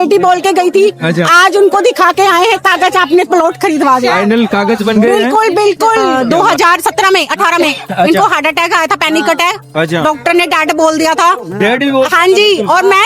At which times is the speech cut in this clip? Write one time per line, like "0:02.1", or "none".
0:06.1